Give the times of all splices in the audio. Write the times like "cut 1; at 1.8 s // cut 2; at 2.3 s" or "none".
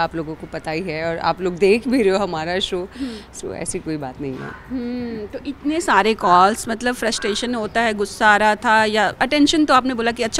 none